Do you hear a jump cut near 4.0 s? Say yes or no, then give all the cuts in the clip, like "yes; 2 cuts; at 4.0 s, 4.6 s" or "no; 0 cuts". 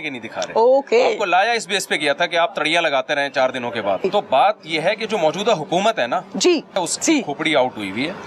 yes; 2 cuts; at 4.0 s, 6.8 s